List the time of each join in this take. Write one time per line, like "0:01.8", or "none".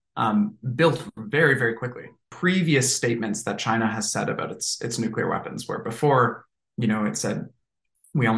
0:02.3